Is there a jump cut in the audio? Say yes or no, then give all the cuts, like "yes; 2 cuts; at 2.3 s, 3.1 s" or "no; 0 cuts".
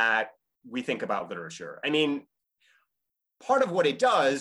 no; 0 cuts